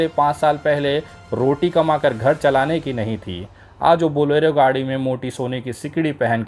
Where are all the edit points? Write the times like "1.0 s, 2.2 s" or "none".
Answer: none